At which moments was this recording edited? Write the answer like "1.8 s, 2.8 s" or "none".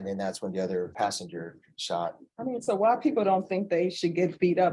0.9 s